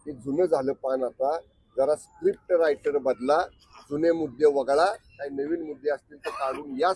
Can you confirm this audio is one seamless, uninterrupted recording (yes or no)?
yes